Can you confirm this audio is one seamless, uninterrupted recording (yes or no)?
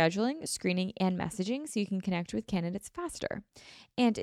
yes